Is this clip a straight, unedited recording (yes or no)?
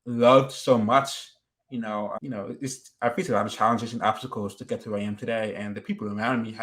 yes